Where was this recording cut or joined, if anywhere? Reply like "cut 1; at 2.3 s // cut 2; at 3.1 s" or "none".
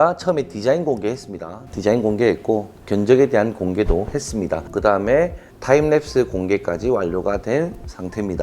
cut 1; at 4.6 s